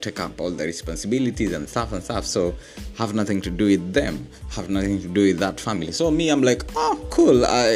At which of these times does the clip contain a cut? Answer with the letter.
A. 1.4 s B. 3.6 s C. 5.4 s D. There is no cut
D